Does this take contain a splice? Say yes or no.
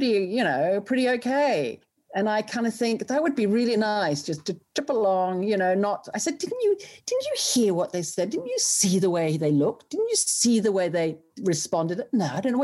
no